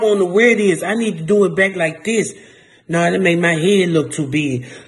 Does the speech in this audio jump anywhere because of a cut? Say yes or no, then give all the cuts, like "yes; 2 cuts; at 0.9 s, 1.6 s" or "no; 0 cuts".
no; 0 cuts